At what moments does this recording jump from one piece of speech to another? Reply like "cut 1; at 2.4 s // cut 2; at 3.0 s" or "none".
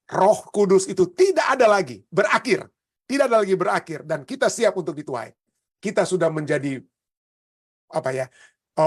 none